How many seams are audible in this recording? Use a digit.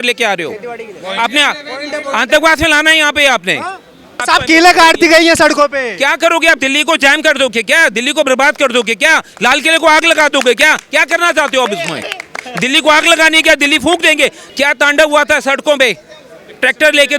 2